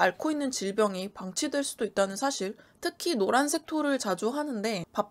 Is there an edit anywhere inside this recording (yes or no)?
yes